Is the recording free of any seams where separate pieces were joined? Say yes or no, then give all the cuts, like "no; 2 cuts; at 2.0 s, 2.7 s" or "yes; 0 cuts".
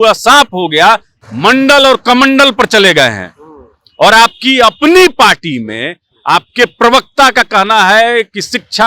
no; 1 cut; at 1.2 s